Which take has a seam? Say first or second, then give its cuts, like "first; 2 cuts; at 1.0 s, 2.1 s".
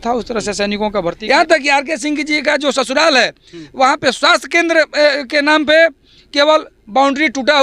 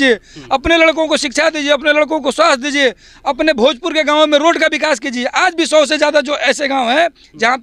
first; 1 cut; at 1.1 s